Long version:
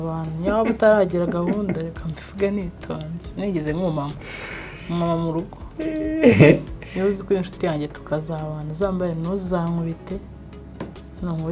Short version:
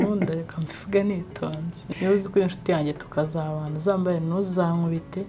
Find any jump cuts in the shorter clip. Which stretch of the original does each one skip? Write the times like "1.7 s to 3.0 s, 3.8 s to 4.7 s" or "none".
3.3 s to 6.7 s